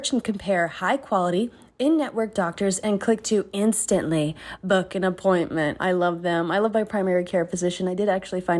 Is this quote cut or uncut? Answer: cut